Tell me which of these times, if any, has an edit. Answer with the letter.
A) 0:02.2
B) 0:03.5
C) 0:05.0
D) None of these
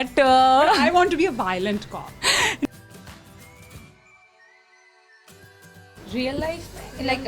D